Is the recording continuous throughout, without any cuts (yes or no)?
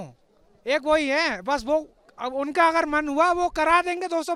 yes